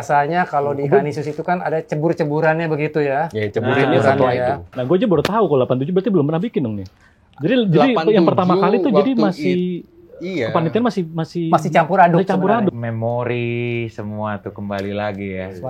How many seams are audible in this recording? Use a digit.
2